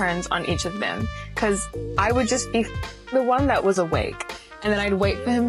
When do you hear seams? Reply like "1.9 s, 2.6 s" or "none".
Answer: 1.1 s